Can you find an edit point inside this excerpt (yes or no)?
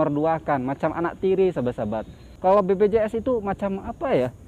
yes